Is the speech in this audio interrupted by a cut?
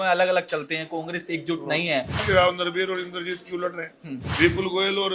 yes; 2 cuts; at 2.2 s, 4.3 s

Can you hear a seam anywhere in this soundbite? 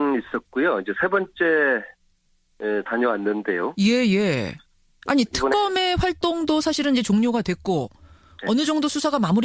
no; 0 cuts

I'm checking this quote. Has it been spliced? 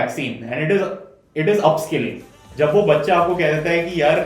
yes; 1 cut; at 2.4 s

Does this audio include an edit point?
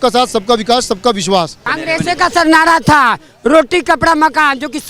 yes; 1 cut; at 1.6 s

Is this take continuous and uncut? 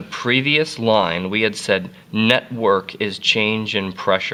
yes; 0 cuts

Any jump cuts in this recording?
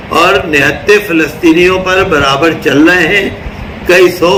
no; 0 cuts

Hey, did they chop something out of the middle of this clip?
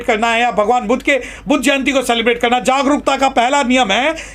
no; 0 cuts

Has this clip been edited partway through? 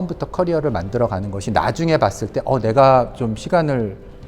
no; 0 cuts

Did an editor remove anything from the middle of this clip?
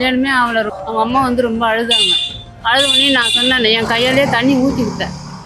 no; 0 cuts

